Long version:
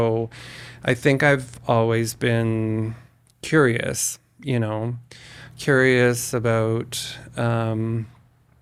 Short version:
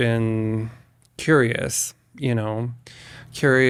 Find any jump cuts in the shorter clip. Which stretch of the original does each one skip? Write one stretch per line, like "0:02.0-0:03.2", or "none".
none